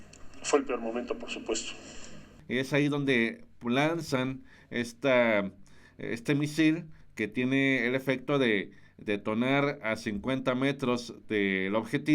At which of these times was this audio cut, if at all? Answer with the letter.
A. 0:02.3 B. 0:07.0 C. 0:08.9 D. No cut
A